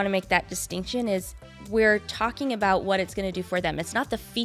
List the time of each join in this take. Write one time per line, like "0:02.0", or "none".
none